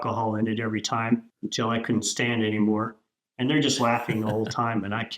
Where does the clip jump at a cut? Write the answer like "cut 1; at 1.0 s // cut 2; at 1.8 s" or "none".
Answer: cut 1; at 1.3 s